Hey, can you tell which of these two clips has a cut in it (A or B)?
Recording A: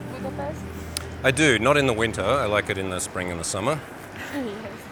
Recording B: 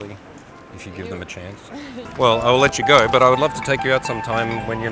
B